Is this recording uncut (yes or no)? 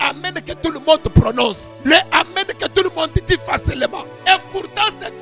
no